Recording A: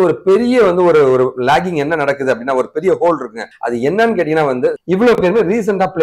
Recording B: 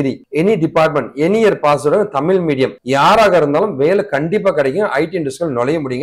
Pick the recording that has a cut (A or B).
A